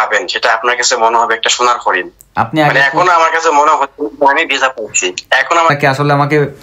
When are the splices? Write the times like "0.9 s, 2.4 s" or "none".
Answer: 5.7 s